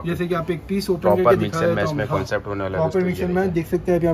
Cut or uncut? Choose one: uncut